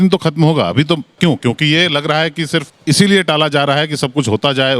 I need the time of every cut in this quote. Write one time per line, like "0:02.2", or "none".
0:01.1
0:02.7

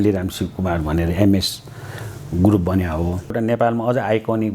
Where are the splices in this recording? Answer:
0:03.4

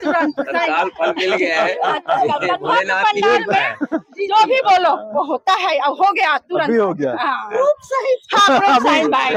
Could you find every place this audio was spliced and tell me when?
none

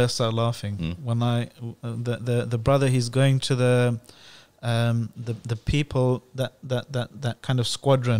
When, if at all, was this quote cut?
none

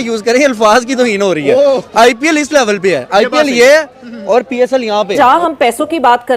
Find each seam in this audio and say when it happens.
0:05.2

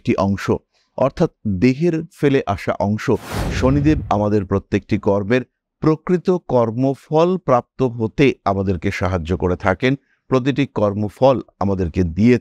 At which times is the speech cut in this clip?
0:03.4

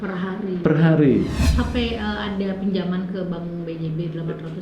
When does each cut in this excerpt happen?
0:01.4

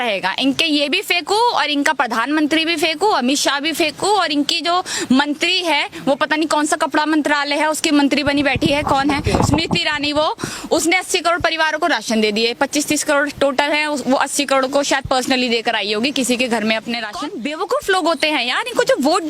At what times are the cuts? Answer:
0:17.2

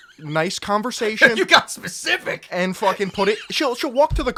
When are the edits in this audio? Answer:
none

